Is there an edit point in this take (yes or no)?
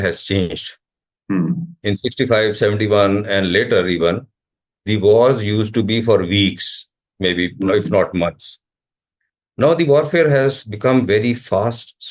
no